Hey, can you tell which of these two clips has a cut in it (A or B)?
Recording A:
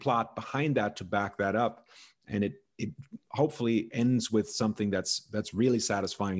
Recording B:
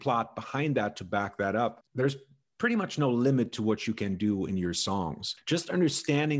B